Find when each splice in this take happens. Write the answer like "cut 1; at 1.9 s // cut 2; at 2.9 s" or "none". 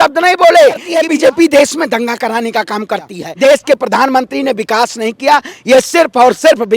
cut 1; at 0.9 s // cut 2; at 3.2 s